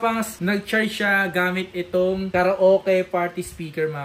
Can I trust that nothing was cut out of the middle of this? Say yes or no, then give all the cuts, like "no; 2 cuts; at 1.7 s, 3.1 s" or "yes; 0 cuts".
no; 1 cut; at 2.3 s